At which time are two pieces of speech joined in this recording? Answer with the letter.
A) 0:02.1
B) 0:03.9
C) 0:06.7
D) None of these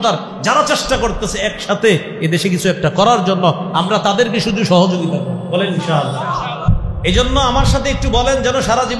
C